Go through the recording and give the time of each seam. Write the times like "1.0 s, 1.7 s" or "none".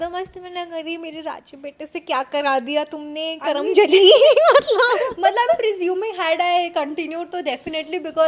none